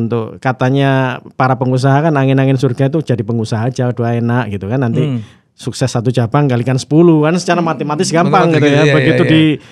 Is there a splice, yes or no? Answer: no